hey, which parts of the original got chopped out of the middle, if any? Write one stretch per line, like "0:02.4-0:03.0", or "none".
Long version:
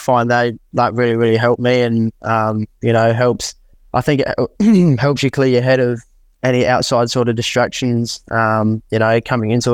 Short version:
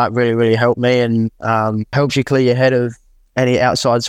0:02.7-0:05.0